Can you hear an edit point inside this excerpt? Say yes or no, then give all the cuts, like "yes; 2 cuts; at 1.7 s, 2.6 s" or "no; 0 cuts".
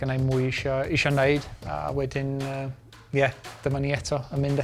no; 0 cuts